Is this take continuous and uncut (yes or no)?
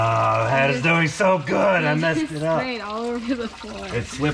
yes